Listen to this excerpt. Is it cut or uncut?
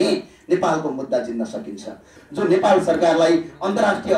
cut